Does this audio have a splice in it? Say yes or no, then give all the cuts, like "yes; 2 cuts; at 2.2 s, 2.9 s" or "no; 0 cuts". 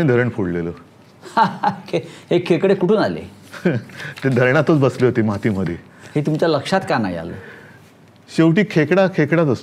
no; 0 cuts